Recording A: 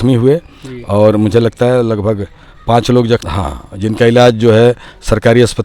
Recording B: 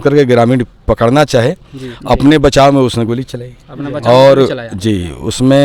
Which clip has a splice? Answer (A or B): A